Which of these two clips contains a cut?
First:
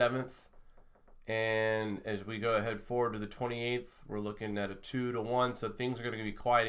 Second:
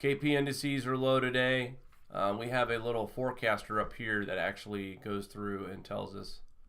second; 1 cut; at 5.2 s

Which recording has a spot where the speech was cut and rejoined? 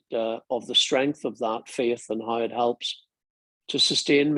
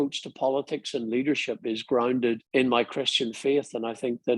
second; 1 cut; at 2.4 s

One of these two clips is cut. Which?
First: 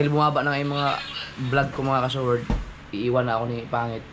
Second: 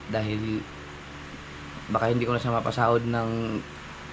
first; 1 cut; at 2.5 s

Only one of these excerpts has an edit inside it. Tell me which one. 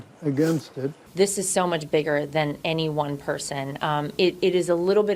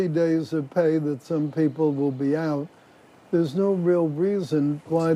first; 1 cut; at 1.0 s

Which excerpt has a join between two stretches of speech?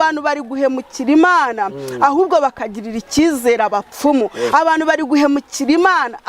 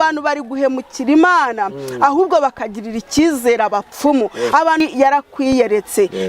second; 1 cut; at 4.8 s

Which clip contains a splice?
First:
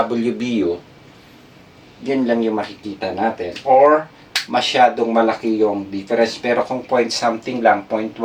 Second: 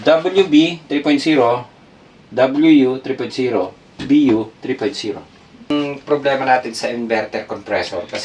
second; 1 cut; at 5.7 s

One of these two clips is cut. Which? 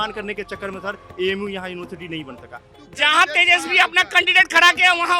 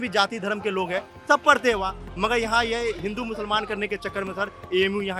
first; 1 cut; at 2.7 s

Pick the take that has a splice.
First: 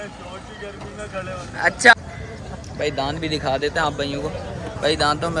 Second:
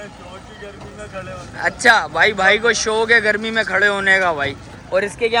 first; 1 cut; at 1.9 s

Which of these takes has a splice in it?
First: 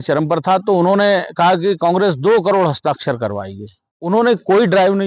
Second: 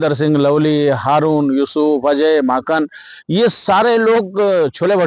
first; 1 cut; at 3.6 s

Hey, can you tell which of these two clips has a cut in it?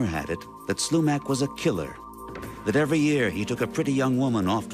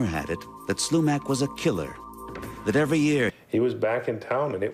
first; 1 cut; at 3.3 s

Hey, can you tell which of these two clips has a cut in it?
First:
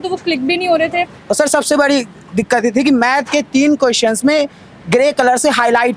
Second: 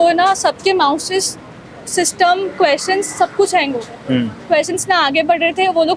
first; 1 cut; at 1.2 s

